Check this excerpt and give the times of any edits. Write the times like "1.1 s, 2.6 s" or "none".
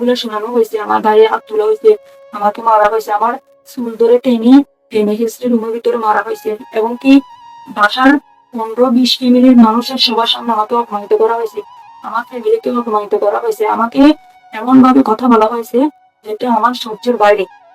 none